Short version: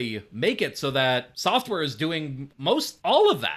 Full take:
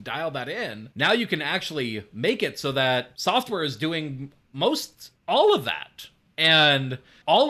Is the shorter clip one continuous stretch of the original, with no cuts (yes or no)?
no